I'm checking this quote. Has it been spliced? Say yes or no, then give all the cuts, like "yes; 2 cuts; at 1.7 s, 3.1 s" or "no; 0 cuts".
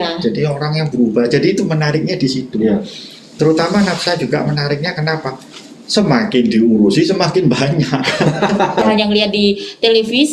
yes; 1 cut; at 8.8 s